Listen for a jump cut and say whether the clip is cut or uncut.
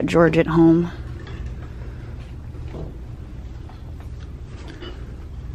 uncut